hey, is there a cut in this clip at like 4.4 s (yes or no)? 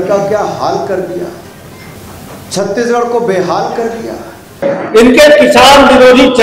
yes